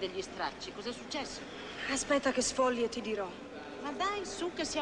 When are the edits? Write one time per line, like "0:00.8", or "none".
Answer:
none